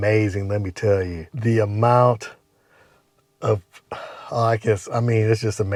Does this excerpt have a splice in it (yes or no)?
no